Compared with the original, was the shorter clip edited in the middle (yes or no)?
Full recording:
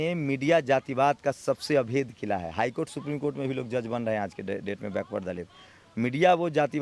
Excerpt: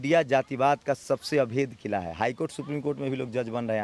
no